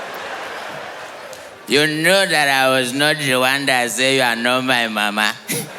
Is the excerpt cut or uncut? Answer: uncut